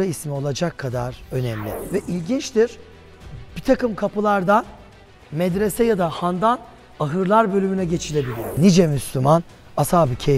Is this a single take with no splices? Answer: no; 2 cuts; at 1.7 s, 8.6 s

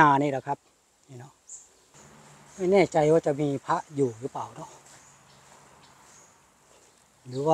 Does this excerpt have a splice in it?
yes; 1 cut; at 2.0 s

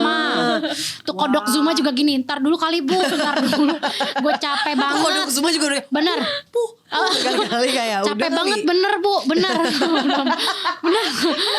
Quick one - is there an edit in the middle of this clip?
no; 0 cuts

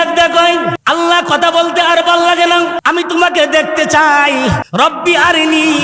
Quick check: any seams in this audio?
yes; 3 cuts; at 0.7 s, 2.8 s, 4.6 s

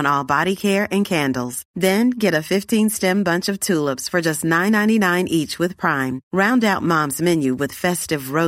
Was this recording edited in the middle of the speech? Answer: no; 0 cuts

